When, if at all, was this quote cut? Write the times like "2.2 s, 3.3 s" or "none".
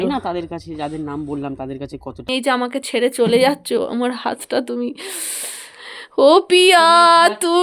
2.3 s